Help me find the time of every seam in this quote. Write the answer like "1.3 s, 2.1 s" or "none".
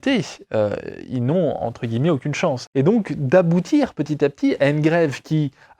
2.6 s